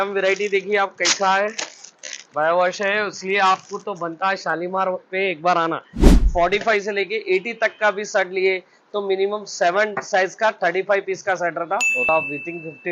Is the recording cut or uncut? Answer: cut